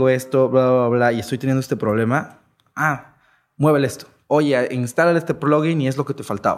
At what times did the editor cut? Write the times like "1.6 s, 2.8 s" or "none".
4.1 s